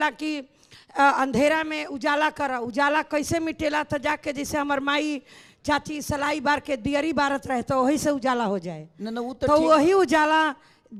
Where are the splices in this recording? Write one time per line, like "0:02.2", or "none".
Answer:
none